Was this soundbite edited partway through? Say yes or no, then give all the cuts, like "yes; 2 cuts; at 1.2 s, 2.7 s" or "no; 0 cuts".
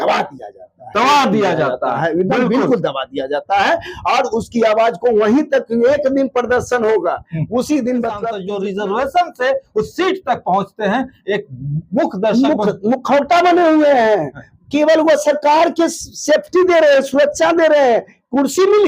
yes; 1 cut; at 8.4 s